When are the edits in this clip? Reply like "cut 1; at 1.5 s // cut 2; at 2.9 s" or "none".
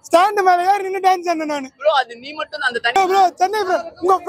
cut 1; at 3.0 s